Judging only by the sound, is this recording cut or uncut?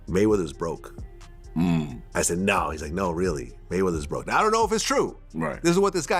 uncut